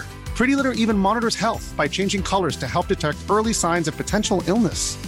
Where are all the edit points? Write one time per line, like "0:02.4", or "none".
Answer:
none

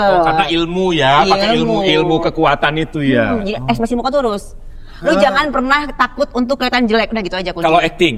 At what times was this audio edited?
none

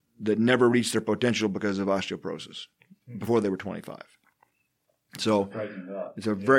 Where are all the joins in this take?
none

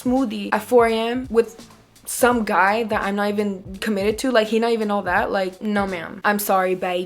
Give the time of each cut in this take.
0:06.1

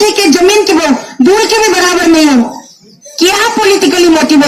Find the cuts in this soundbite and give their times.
none

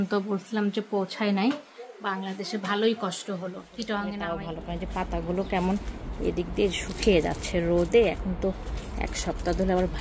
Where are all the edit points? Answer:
0:04.3

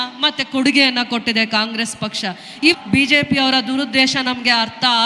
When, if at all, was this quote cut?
0:02.7

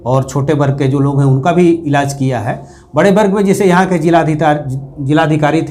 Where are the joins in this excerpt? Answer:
none

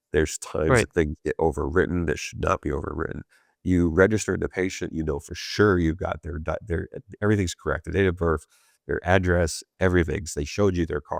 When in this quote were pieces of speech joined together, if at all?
none

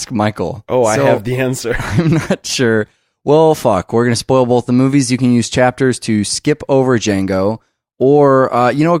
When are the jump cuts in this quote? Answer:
none

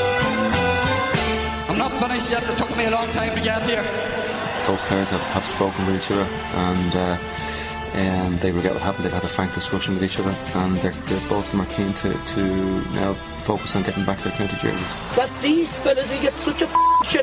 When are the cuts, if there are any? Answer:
none

